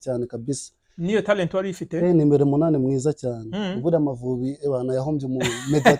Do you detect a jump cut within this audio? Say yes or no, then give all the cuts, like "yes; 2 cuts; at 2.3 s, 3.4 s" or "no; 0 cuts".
no; 0 cuts